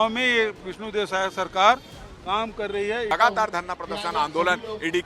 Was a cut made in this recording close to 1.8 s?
no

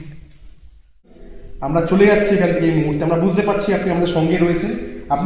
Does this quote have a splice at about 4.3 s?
no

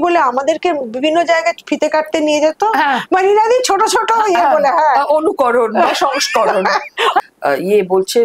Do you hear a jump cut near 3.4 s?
no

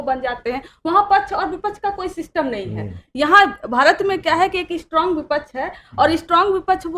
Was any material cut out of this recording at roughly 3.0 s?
no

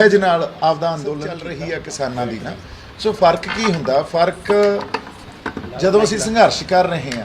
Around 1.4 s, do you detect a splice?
yes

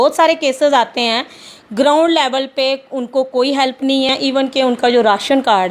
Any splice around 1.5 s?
no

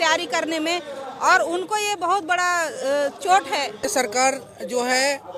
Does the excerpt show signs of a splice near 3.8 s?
yes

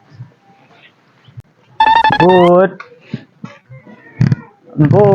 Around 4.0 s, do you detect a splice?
no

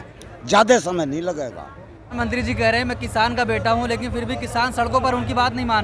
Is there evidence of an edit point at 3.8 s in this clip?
no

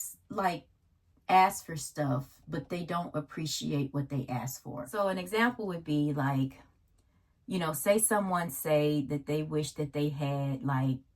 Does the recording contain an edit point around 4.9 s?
yes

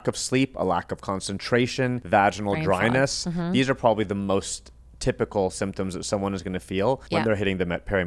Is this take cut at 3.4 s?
no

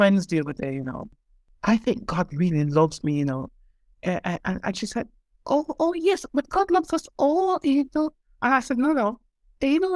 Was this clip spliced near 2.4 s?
no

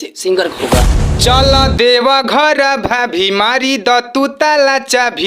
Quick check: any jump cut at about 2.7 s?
no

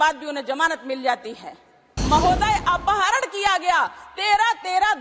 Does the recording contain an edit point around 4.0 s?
no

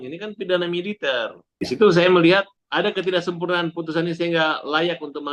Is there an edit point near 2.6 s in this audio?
yes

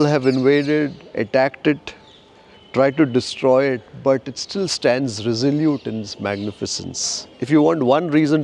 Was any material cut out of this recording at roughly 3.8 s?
no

